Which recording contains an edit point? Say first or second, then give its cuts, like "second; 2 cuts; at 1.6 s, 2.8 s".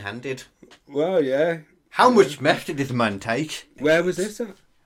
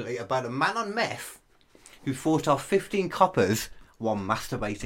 first; 1 cut; at 3.6 s